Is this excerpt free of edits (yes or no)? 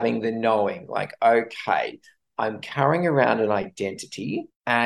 yes